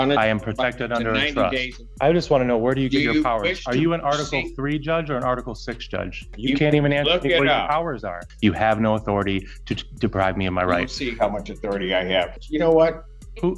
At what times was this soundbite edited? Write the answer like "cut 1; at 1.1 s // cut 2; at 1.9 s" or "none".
cut 1; at 1.8 s // cut 2; at 6.3 s // cut 3; at 8.2 s // cut 4; at 12.3 s